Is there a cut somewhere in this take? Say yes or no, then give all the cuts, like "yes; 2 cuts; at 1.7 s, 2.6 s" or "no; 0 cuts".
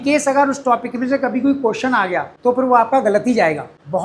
no; 0 cuts